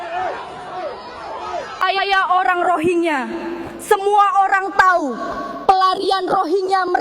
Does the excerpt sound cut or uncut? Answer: cut